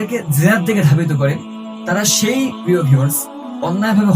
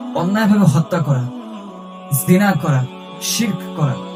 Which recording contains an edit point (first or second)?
first